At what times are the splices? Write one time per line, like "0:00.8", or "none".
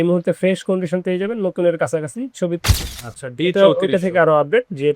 0:02.6

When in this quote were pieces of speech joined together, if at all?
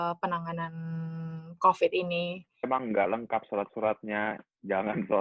0:02.7

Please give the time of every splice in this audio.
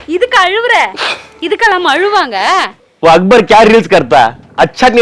0:02.8

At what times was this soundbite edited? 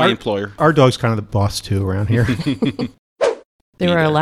0:03.1

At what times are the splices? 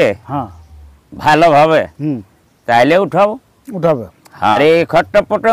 0:04.6

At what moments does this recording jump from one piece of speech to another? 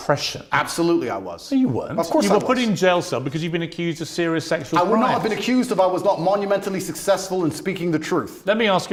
none

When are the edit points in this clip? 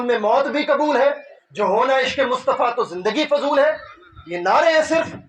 none

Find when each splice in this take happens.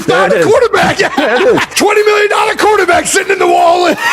0:01.7

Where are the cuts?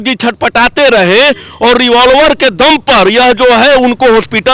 none

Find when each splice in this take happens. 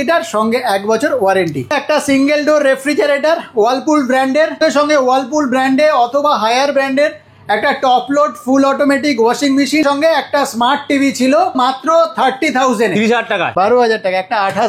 0:01.7
0:04.6
0:09.8
0:11.5
0:13.5

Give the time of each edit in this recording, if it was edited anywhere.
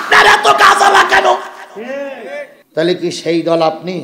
0:02.5

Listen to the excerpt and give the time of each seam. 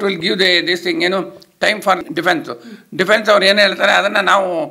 0:02.0

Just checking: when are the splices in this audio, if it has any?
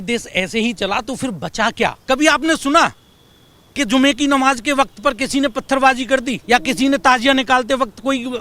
0:02.0
0:06.3

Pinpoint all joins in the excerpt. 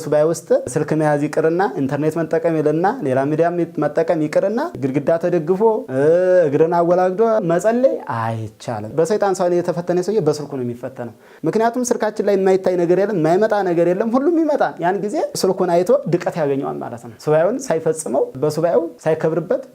none

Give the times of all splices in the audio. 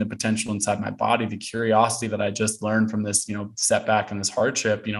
none

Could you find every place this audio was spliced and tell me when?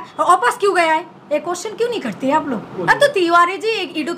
0:02.8

